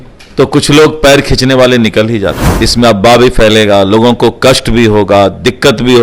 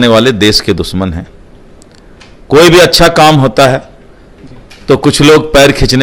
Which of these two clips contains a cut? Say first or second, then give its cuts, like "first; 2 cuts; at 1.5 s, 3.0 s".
first; 1 cut; at 2.4 s